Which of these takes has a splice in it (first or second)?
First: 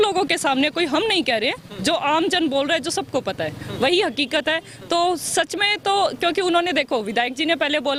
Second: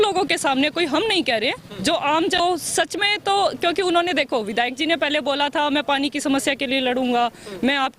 second